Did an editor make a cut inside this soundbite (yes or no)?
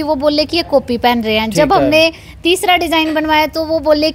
no